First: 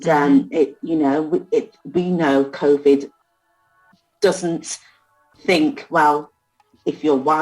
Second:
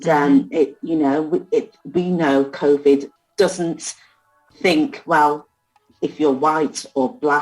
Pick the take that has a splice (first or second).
second